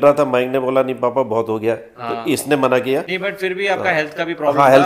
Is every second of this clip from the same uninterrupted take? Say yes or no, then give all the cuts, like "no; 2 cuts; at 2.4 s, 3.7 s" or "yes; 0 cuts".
no; 1 cut; at 3.1 s